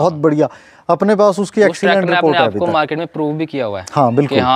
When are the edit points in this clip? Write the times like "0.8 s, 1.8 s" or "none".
none